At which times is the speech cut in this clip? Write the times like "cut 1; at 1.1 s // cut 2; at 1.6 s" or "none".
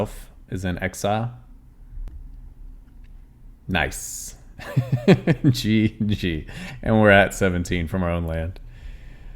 cut 1; at 2.1 s

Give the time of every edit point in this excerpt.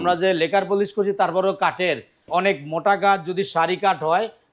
cut 1; at 2.1 s

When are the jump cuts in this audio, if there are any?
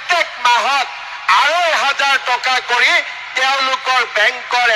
none

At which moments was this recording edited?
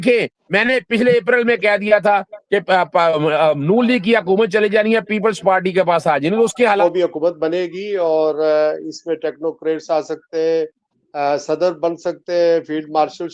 cut 1; at 6.8 s

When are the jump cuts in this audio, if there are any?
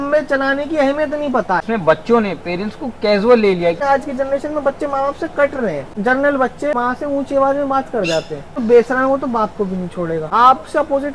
cut 1; at 1.6 s // cut 2; at 3.8 s // cut 3; at 5.9 s // cut 4; at 6.7 s // cut 5; at 8.6 s // cut 6; at 10.3 s

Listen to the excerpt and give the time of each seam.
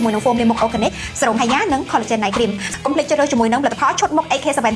cut 1; at 2.7 s

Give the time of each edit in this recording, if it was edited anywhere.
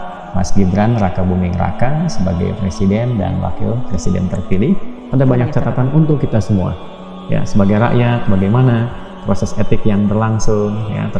cut 1; at 4.9 s

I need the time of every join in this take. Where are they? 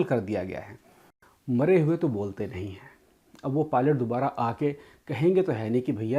cut 1; at 1.1 s

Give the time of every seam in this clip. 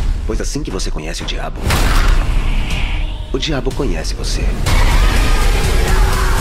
none

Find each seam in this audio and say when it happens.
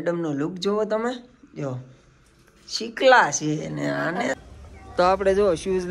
cut 1; at 4.4 s

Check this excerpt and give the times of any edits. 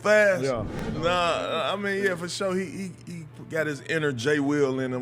cut 1; at 0.9 s

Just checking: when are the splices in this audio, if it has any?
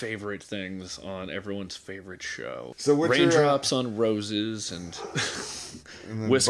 cut 1; at 2.7 s

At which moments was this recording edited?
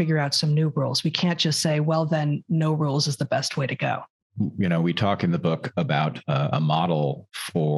cut 1; at 4.1 s

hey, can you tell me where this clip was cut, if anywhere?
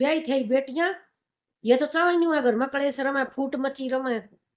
none

